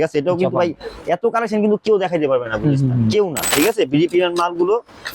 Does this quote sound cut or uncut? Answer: cut